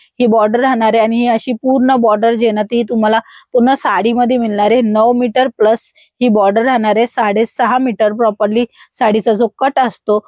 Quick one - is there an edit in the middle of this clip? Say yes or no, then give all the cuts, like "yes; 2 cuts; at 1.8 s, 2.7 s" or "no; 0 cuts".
no; 0 cuts